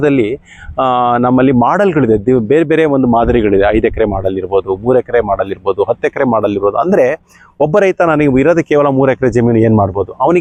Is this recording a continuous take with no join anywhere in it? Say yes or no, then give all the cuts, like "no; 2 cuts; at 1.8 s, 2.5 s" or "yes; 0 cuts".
yes; 0 cuts